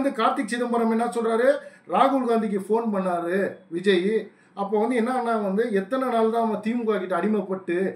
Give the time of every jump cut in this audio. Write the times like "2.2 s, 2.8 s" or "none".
none